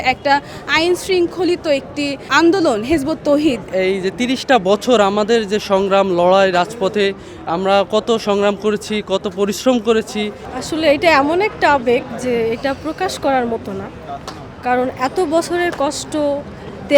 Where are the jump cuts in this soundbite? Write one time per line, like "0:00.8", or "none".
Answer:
0:02.2
0:03.7
0:10.5